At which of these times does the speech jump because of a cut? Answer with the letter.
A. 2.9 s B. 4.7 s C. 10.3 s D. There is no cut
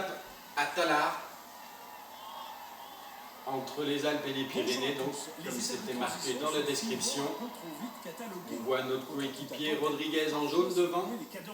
B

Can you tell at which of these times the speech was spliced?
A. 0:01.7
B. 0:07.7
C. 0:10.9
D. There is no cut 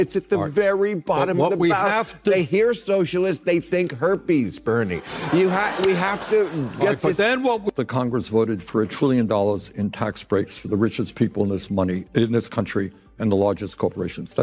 B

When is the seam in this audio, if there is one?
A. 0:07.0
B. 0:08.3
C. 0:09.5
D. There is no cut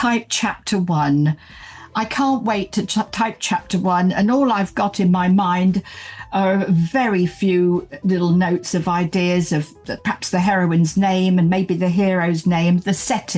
D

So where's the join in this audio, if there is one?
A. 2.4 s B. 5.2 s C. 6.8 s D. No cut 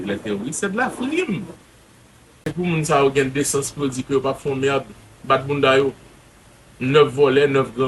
A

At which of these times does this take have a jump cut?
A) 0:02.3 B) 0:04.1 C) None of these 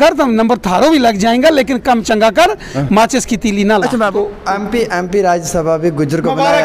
B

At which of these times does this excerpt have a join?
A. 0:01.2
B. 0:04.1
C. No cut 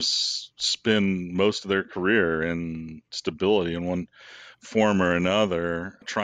C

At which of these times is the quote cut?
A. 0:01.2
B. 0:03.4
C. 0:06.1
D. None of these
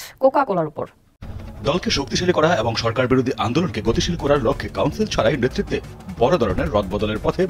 A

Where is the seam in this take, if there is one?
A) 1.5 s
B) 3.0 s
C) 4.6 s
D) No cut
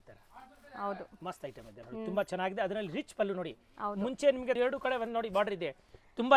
C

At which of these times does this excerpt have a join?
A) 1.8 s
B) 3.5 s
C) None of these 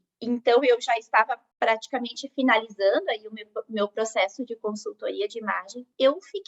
A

